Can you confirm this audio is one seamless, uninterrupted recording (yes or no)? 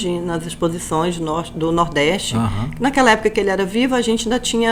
yes